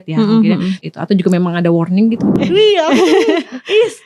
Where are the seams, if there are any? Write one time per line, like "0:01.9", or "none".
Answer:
0:00.8
0:02.3